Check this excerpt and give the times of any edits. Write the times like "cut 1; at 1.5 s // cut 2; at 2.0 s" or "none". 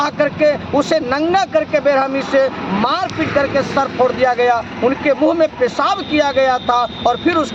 none